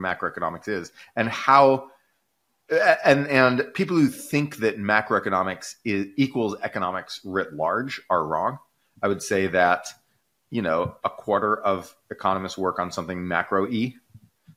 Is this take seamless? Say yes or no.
yes